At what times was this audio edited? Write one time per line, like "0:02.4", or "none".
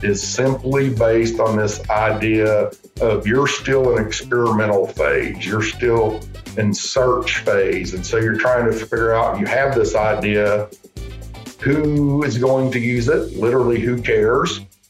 none